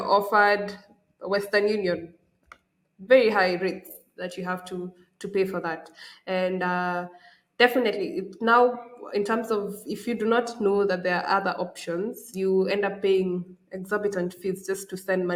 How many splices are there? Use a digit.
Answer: 0